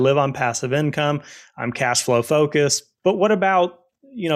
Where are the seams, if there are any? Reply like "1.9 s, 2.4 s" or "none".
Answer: 2.9 s